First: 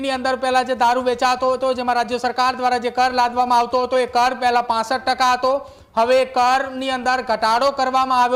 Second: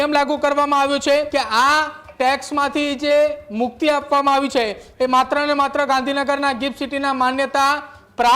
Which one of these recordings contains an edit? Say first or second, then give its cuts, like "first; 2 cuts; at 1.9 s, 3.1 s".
second; 1 cut; at 1.3 s